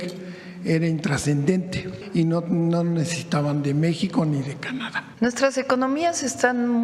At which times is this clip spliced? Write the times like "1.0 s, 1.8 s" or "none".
1.9 s, 5.0 s